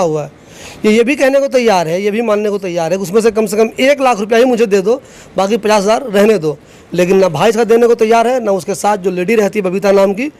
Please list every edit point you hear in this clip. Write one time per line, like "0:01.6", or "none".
none